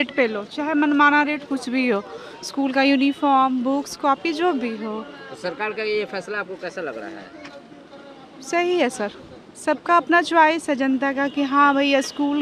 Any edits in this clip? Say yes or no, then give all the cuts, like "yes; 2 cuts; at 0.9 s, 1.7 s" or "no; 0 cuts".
no; 0 cuts